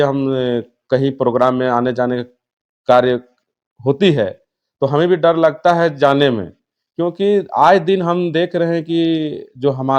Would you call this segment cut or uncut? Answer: uncut